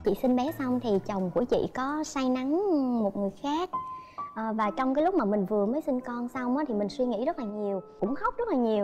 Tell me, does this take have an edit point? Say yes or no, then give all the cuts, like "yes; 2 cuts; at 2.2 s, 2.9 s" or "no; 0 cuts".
no; 0 cuts